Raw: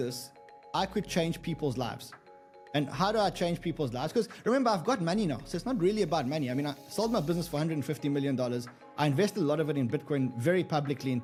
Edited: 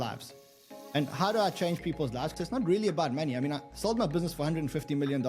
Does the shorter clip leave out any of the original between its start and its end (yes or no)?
yes